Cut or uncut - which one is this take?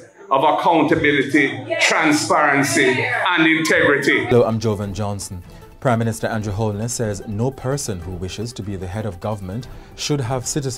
cut